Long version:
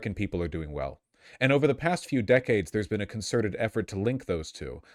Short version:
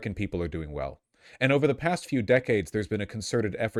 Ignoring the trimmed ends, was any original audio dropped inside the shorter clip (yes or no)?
no